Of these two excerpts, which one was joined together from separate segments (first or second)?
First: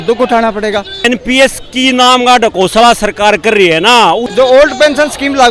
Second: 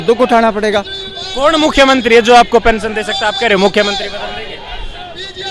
first